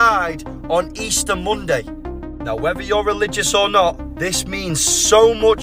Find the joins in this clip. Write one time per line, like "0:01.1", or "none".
none